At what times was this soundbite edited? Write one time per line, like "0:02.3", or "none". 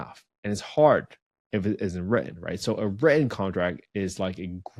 none